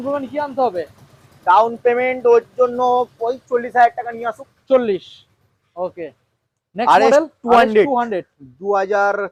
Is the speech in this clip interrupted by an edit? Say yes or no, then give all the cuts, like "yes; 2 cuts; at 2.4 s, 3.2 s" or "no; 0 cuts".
no; 0 cuts